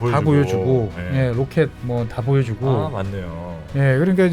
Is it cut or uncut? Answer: uncut